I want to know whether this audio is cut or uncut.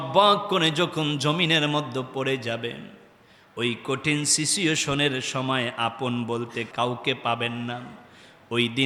uncut